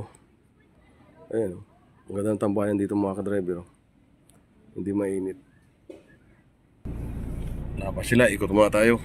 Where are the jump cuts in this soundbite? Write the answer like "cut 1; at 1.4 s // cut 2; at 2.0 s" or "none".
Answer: cut 1; at 6.8 s